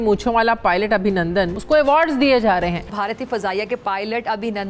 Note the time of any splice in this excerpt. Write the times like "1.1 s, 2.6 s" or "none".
1.5 s, 2.8 s